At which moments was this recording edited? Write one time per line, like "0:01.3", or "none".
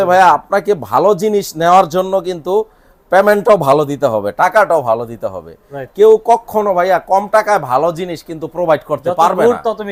none